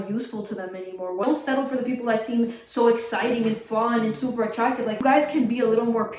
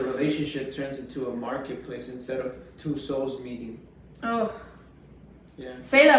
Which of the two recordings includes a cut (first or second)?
first